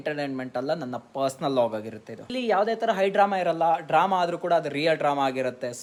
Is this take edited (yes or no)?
no